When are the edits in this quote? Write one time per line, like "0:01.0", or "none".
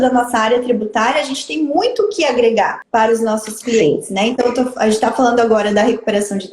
0:02.8